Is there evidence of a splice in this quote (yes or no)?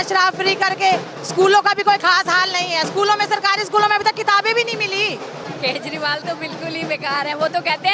yes